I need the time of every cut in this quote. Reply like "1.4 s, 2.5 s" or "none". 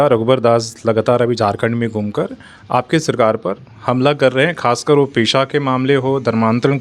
none